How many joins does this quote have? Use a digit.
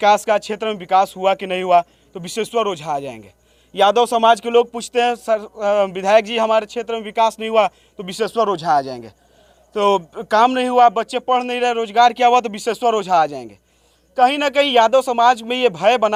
0